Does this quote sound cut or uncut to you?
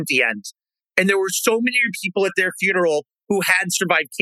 uncut